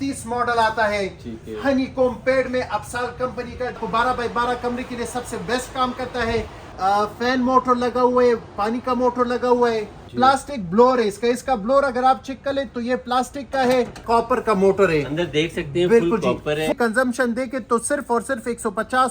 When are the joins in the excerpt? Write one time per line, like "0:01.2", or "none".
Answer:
0:03.8
0:06.6
0:10.0
0:14.0
0:16.7